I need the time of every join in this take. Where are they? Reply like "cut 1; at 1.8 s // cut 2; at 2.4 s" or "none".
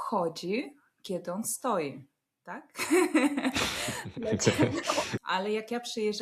cut 1; at 5.1 s